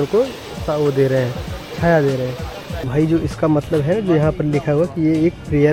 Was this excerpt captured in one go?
no; 1 cut; at 2.9 s

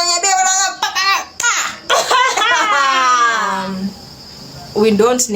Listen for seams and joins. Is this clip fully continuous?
no; 1 cut; at 3.6 s

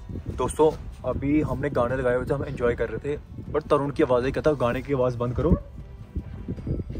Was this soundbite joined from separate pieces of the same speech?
no; 0 cuts

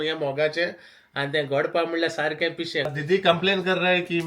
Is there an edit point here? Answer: yes; 1 cut; at 2.9 s

